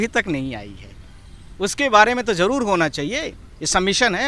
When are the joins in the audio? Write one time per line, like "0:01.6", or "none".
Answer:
none